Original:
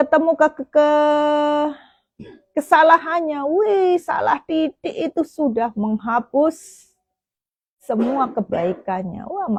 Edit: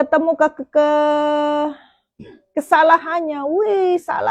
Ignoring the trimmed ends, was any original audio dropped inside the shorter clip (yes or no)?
no